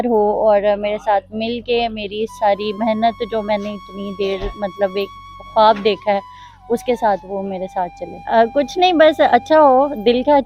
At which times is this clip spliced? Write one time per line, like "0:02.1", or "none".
0:08.1